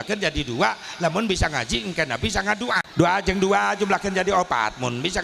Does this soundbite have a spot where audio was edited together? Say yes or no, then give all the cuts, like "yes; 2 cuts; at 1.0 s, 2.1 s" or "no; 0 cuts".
yes; 1 cut; at 2.9 s